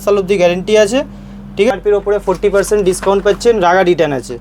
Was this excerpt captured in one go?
no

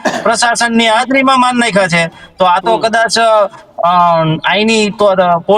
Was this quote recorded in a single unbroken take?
yes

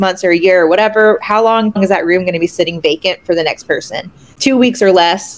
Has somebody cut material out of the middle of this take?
yes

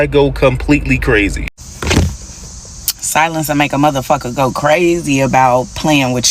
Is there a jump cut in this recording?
yes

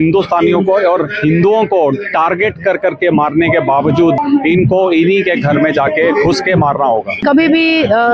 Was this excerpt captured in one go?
no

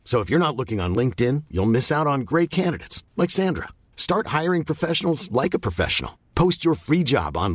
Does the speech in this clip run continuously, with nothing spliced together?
yes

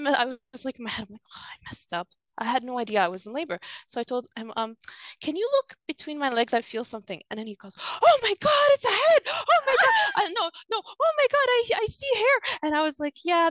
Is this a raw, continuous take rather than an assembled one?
yes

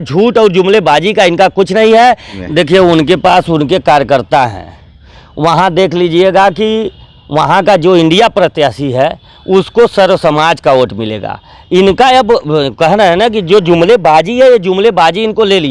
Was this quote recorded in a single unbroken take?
no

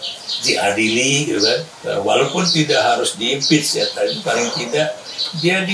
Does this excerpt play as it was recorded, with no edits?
yes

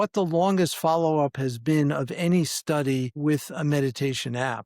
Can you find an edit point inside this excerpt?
yes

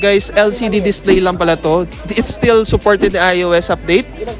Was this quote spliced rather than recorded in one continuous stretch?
no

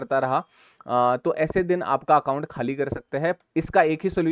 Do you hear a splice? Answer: yes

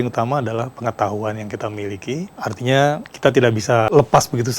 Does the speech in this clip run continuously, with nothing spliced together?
no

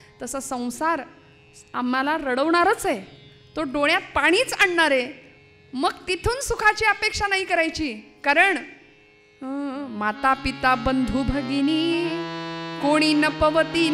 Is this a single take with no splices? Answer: yes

